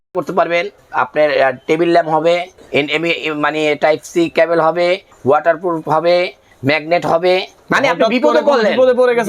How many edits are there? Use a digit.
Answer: 2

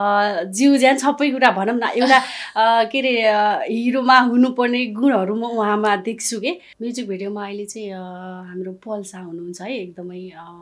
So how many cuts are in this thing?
1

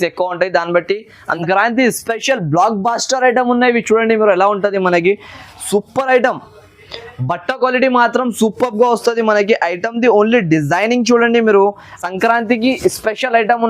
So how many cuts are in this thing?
2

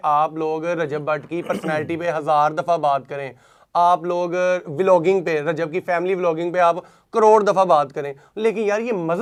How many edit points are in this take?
0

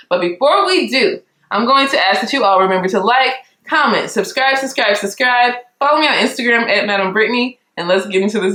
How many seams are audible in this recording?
0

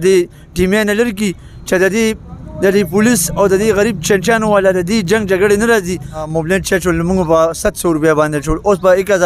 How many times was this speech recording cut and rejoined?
1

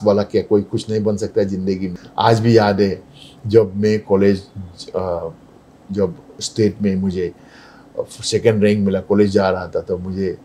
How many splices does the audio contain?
1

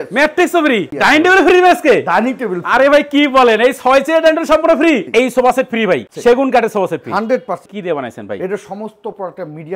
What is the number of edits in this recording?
3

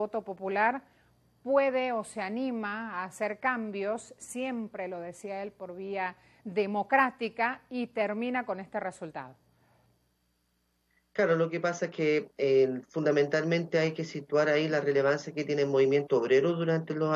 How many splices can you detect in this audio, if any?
1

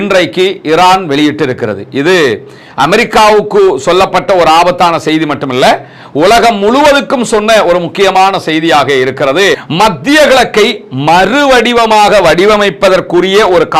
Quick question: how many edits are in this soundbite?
1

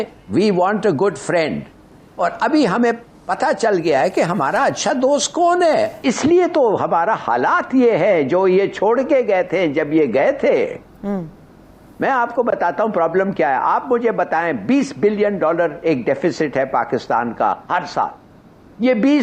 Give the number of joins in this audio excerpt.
1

